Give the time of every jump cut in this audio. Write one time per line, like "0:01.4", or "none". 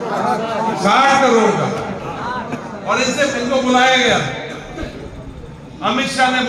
none